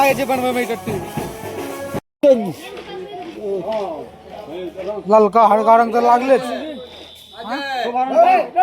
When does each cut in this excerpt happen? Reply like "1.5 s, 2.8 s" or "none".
2.0 s